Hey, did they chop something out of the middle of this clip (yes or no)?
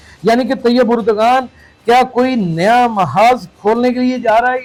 no